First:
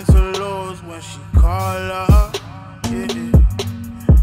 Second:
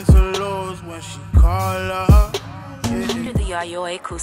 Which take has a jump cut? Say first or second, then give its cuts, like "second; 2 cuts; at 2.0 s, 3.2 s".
first; 1 cut; at 3.2 s